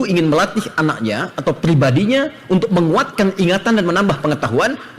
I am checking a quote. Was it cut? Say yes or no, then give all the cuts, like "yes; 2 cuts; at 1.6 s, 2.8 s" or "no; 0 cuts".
no; 0 cuts